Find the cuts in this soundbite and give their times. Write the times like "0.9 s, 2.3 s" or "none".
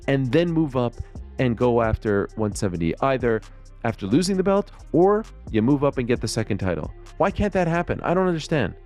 none